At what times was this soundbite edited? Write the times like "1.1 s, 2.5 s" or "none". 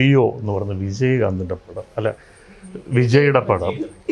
none

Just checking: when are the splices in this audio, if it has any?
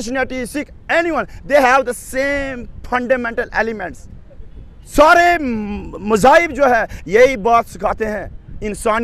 none

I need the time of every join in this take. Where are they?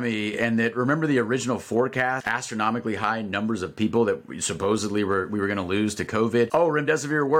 2.2 s, 6.5 s

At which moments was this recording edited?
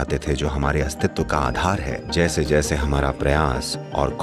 2.0 s

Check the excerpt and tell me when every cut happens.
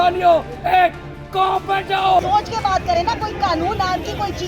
2.2 s

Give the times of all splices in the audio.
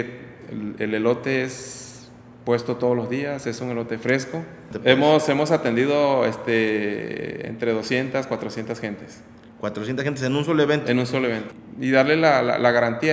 4.7 s, 11.5 s

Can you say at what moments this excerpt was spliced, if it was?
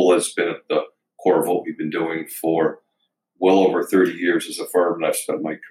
none

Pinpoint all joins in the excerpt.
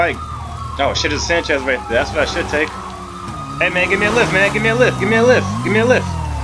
none

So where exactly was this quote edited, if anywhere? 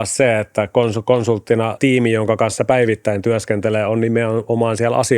1.8 s

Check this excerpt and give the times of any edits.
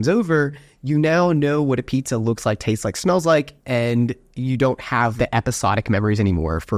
3.6 s, 5.1 s

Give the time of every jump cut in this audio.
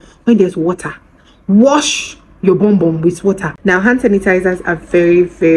3.5 s

